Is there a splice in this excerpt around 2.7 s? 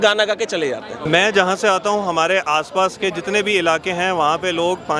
no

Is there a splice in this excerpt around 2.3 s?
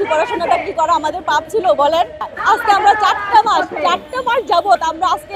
yes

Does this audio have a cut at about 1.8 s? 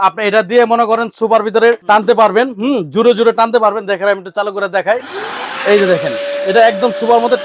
yes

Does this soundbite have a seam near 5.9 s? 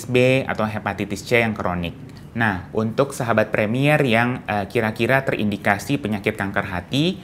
no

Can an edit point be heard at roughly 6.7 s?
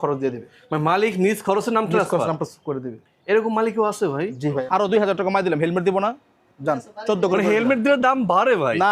no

